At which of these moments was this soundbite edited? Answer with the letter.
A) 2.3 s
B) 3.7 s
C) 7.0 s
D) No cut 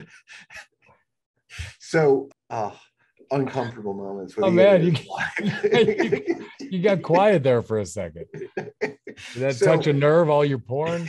A